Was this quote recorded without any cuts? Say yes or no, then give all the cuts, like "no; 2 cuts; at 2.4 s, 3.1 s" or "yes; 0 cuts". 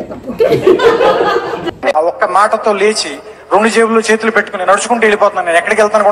no; 1 cut; at 1.7 s